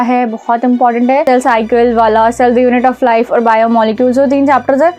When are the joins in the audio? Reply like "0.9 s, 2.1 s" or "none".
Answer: 1.2 s